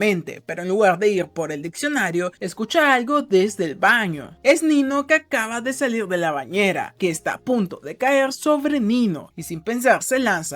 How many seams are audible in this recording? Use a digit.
1